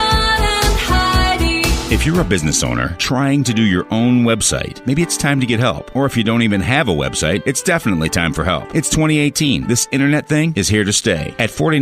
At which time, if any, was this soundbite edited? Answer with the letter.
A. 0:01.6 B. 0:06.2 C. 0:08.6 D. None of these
A